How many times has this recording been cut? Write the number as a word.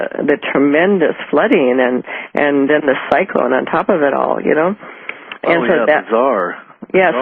zero